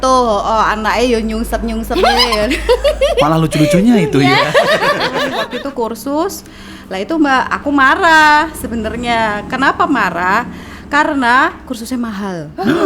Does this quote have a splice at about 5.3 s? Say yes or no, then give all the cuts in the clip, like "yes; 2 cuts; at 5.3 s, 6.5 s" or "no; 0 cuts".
yes; 1 cut; at 5.3 s